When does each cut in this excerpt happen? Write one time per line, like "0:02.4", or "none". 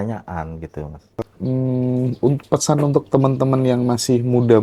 0:01.3